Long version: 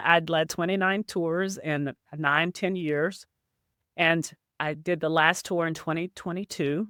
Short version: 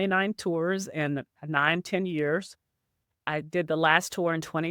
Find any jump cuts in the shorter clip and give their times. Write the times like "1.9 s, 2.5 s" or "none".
3.1 s